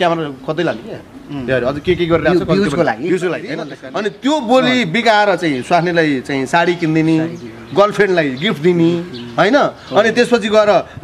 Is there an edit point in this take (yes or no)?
yes